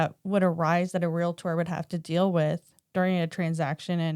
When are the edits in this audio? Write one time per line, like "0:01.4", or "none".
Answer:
0:02.7